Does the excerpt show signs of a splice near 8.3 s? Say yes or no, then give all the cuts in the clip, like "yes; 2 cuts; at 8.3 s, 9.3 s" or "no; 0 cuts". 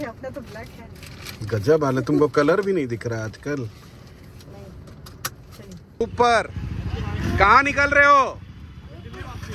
no; 1 cut; at 6.0 s